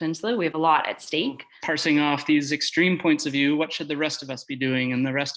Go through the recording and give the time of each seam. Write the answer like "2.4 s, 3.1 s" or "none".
1.5 s